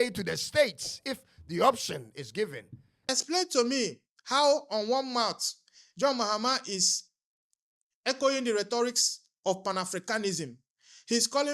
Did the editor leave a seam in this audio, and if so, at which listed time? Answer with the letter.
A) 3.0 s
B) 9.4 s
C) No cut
A